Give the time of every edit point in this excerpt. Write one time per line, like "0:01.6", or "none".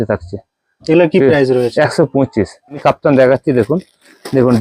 0:02.8